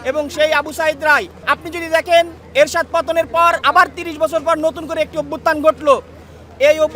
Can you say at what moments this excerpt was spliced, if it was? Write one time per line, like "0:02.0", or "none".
0:01.3
0:03.6

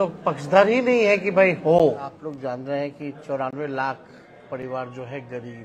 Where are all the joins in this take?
0:02.2

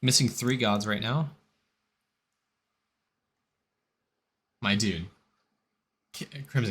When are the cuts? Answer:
0:03.1

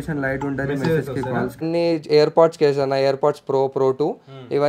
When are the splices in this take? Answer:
0:01.6

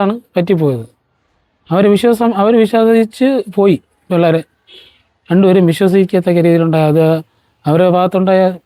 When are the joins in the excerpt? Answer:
none

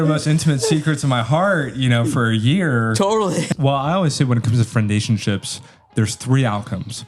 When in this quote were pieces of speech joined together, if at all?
0:03.5

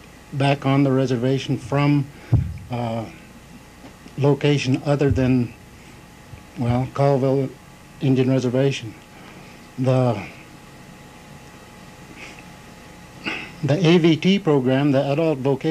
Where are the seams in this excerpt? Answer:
none

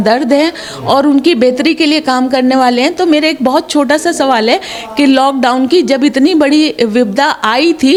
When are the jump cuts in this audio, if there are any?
none

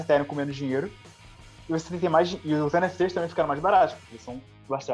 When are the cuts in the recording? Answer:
none

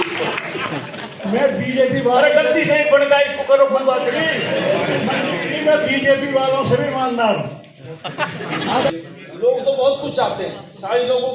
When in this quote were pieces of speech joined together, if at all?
0:08.9

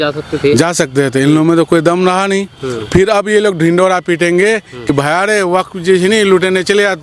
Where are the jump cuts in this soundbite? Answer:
none

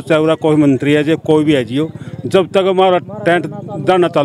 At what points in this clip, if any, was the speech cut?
none

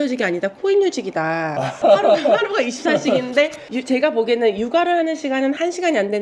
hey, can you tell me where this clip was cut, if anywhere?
none

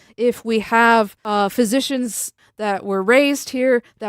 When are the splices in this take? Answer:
0:01.2
0:02.4

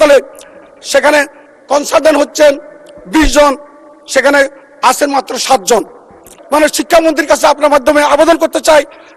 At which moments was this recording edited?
0:06.3

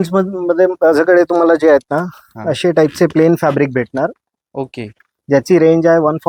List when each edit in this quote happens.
none

